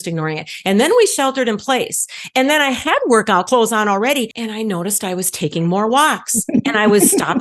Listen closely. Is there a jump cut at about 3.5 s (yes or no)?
yes